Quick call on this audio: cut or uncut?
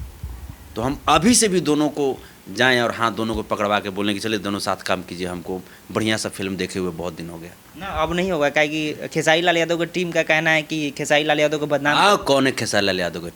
uncut